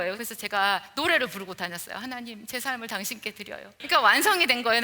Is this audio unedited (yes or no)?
no